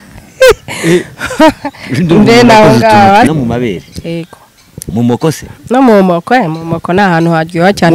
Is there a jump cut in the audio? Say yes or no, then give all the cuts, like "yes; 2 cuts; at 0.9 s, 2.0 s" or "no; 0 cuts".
yes; 1 cut; at 3.3 s